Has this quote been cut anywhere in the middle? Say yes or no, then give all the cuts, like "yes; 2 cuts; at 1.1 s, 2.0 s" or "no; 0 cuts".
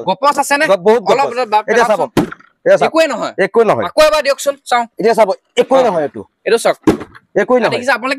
no; 0 cuts